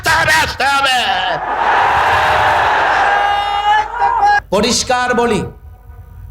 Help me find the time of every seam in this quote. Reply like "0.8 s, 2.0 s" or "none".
4.4 s